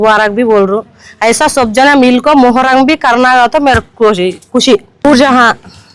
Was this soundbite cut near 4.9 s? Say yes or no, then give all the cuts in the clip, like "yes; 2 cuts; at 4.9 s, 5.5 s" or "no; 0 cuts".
yes; 1 cut; at 4.9 s